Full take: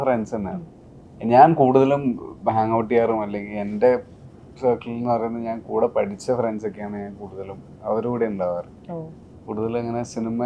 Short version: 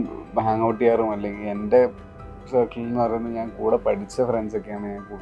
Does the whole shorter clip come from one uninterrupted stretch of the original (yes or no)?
yes